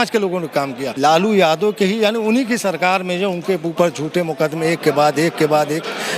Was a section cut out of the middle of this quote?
yes; 1 cut; at 1.0 s

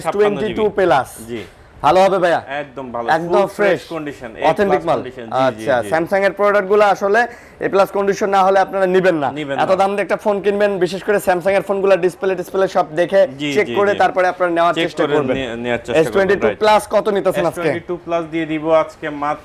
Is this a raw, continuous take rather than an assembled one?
yes; 0 cuts

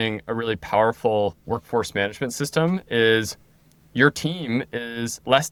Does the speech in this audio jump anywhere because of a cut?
no; 0 cuts

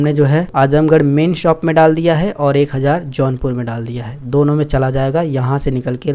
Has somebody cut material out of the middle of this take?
no; 0 cuts

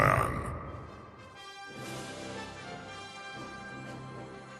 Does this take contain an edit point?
no; 0 cuts

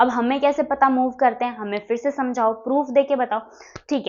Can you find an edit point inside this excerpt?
no; 0 cuts

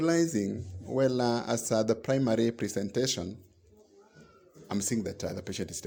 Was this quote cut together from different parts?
no; 0 cuts

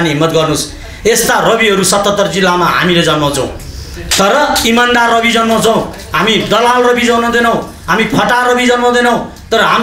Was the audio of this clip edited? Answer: no; 0 cuts

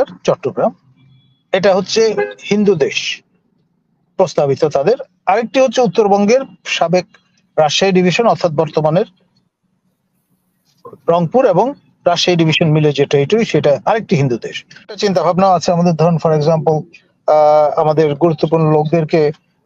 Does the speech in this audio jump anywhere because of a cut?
yes; 1 cut; at 14.9 s

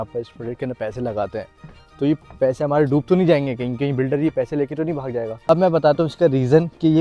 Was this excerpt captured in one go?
no; 1 cut; at 5.5 s

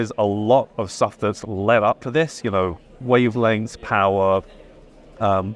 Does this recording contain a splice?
no; 0 cuts

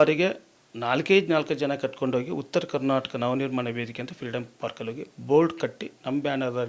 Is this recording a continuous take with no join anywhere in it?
yes; 0 cuts

